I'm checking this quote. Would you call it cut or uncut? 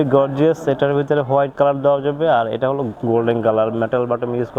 uncut